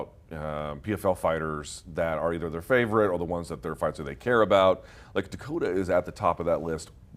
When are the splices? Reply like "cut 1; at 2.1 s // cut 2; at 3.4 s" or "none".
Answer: none